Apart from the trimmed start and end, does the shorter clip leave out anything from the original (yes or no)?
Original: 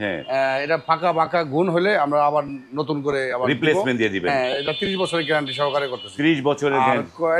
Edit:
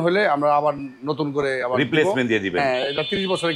no